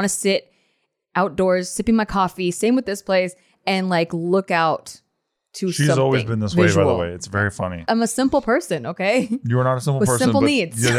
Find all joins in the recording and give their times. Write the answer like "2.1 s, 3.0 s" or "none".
7.9 s